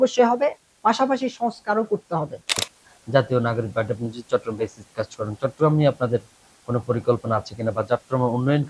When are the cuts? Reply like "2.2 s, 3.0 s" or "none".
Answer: 2.7 s

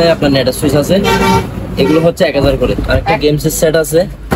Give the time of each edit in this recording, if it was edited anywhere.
2.8 s

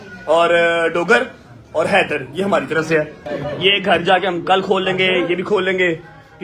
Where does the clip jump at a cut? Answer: 3.3 s

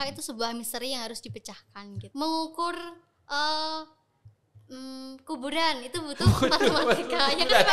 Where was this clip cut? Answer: 2.0 s

